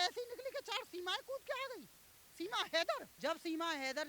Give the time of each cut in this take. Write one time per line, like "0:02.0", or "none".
none